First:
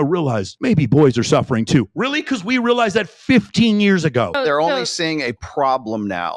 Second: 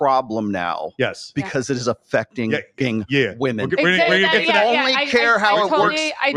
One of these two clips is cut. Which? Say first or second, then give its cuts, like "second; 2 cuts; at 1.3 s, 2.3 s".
first; 1 cut; at 4.3 s